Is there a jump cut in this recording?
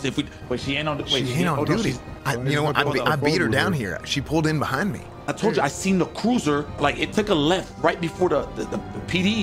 yes; 3 cuts; at 2.1 s, 5.1 s, 6.8 s

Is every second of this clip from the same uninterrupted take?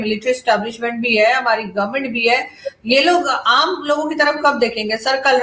yes; 0 cuts

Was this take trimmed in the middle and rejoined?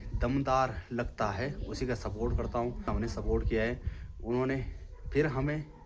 yes; 1 cut; at 2.9 s

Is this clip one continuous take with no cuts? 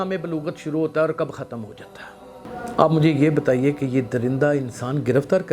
no; 1 cut; at 2.4 s

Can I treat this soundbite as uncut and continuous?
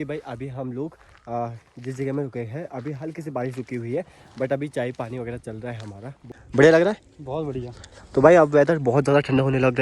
no; 1 cut; at 6.4 s

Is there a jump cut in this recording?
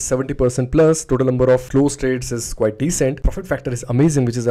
no; 0 cuts

